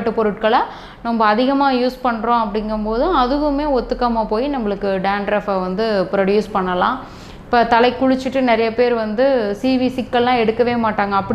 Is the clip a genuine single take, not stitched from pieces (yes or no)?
yes